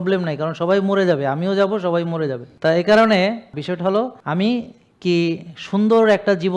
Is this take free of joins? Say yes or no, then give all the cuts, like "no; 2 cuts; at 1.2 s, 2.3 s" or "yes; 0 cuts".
no; 2 cuts; at 2.5 s, 4.0 s